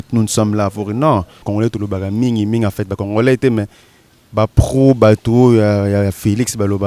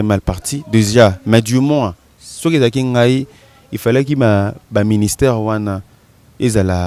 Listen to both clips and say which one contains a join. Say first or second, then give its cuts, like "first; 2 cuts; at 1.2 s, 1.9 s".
first; 1 cut; at 1.5 s